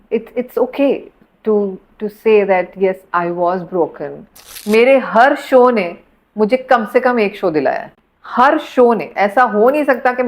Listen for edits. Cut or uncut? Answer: cut